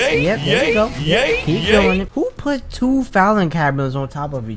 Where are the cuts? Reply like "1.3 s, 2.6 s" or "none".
2.1 s